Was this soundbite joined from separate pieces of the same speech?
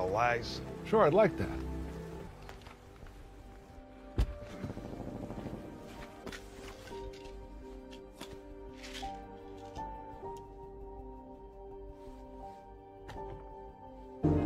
yes; 1 cut; at 6.2 s

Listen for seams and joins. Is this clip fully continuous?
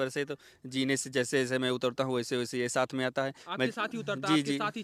yes; 0 cuts

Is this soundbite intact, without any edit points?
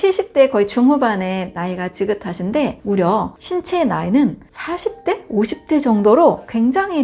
yes; 0 cuts

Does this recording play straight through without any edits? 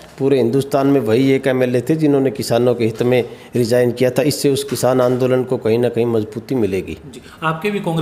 yes; 0 cuts

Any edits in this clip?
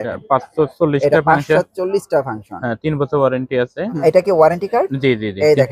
yes; 1 cut; at 4.0 s

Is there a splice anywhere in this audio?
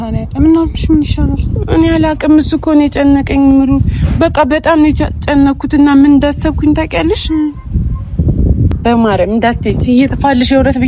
yes; 1 cut; at 8.7 s

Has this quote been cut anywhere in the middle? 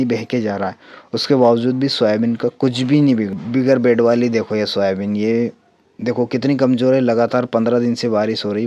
yes; 1 cut; at 3.4 s

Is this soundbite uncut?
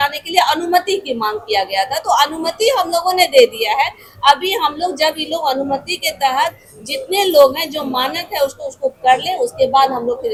yes; 0 cuts

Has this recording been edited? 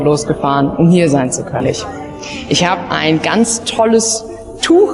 yes; 1 cut; at 1.6 s

